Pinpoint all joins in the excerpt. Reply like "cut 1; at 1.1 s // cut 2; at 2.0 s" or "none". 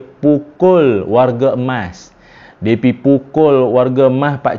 none